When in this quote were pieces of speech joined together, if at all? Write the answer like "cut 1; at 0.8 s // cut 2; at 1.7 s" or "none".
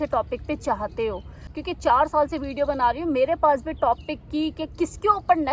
cut 1; at 1.6 s